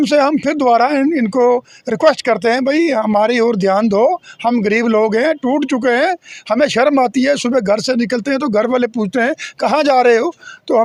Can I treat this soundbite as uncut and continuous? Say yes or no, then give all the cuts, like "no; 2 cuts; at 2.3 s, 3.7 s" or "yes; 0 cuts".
yes; 0 cuts